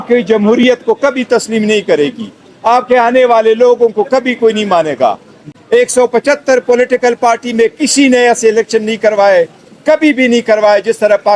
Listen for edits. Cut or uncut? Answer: cut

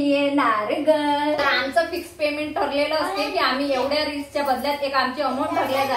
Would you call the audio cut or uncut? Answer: cut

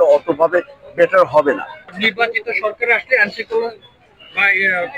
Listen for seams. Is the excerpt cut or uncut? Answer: cut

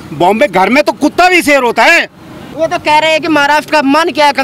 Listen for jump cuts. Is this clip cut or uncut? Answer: cut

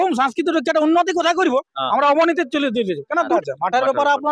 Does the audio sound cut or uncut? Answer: cut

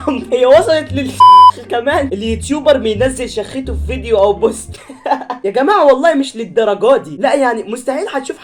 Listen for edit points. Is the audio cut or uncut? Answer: uncut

